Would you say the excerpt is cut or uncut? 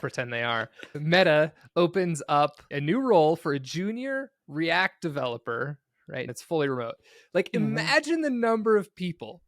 cut